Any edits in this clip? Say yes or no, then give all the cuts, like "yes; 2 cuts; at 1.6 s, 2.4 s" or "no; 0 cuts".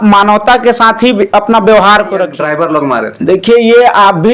yes; 1 cut; at 2.3 s